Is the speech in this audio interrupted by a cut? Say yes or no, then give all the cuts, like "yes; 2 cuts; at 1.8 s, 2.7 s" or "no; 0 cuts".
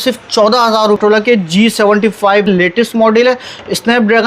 yes; 2 cuts; at 1.0 s, 2.5 s